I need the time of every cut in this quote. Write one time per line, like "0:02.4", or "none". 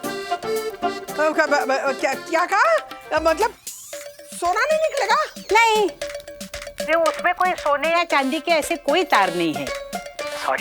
0:01.1
0:06.1